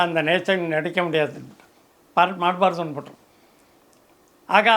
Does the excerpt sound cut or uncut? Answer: uncut